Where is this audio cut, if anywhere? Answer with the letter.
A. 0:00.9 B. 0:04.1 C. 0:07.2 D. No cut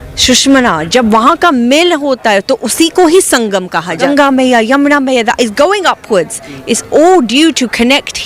B